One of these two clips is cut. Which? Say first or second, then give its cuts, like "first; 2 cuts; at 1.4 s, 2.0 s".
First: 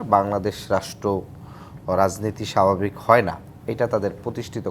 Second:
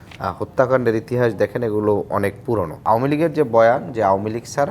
second; 1 cut; at 2.8 s